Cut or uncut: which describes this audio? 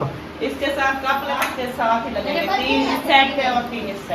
cut